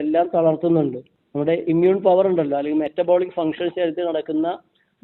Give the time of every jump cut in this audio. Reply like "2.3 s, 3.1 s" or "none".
1.1 s